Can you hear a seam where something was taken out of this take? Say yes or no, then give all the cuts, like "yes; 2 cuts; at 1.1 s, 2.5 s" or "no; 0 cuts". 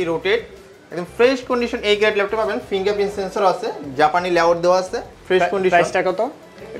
no; 0 cuts